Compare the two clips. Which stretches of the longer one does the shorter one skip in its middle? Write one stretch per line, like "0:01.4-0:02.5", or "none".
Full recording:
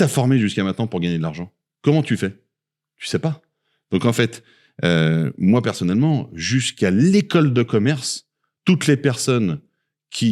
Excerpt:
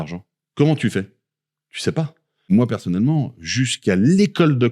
0:03.8-0:05.4

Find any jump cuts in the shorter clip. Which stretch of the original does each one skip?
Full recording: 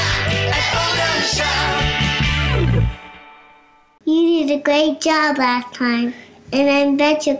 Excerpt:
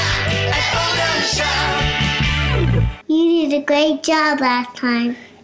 0:02.9-0:03.9

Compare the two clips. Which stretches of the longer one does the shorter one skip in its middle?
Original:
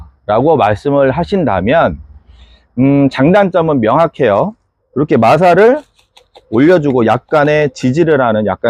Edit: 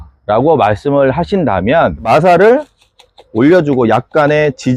0:02.1-0:05.2

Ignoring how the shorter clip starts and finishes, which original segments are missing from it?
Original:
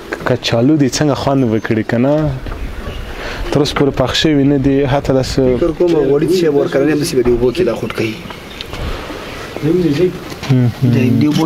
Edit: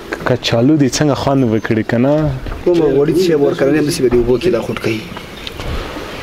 0:02.6-0:05.7

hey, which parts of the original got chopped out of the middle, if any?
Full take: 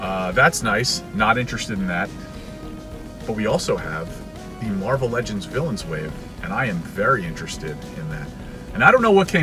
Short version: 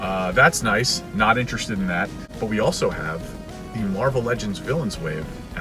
0:02.2-0:03.1

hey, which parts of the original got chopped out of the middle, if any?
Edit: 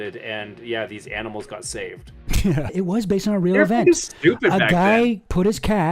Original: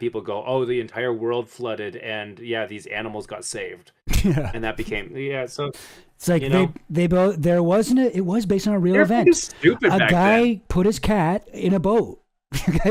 0:04.5-0:08.1

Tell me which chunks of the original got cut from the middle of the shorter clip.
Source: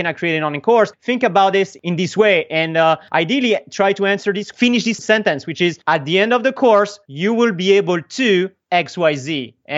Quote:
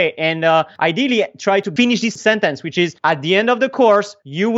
0:04.0-0:04.5

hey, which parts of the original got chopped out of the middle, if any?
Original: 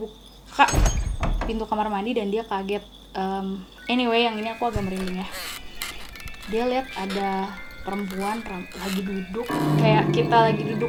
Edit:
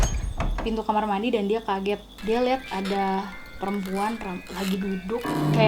0:02.9-0:06.4

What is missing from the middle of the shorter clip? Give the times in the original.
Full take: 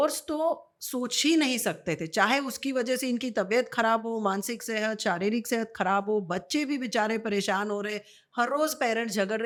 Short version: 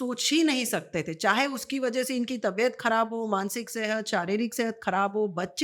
none

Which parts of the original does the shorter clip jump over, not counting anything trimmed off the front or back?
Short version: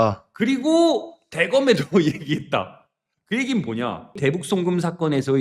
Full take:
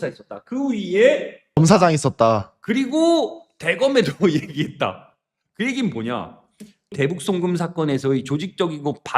0:06.3-0:06.8

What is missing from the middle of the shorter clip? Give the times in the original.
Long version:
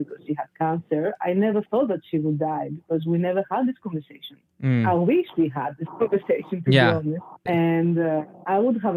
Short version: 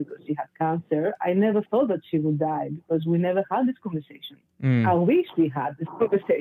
none

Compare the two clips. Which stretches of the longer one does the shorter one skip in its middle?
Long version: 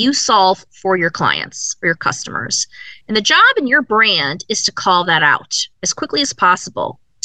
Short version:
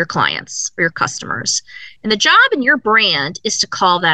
none

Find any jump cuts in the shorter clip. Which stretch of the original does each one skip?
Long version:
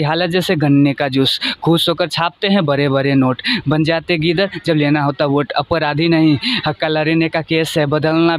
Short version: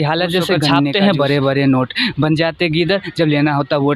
0:00.9-0:02.4

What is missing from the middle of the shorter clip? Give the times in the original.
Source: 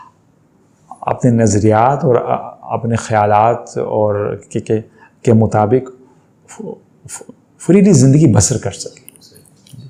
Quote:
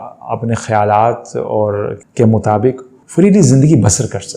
0:04.4-0:05.1
0:06.0-0:07.4

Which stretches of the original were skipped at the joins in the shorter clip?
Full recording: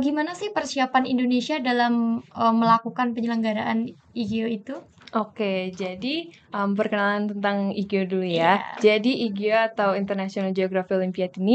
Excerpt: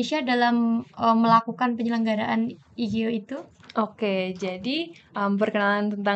none

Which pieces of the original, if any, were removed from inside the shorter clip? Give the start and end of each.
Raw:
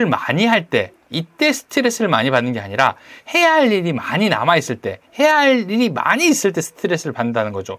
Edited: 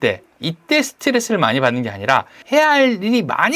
0:03.1-0:05.0

